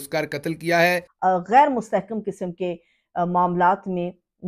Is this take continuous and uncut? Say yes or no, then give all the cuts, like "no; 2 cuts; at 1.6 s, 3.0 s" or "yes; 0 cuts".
no; 1 cut; at 1.1 s